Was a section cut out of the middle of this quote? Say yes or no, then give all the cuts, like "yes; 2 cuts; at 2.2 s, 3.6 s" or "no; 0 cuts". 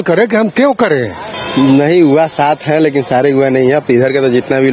yes; 1 cut; at 1.3 s